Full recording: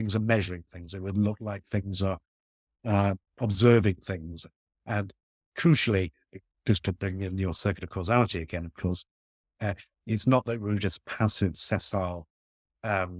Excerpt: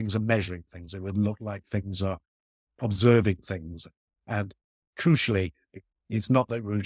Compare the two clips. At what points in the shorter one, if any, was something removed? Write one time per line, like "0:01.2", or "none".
0:02.7
0:05.9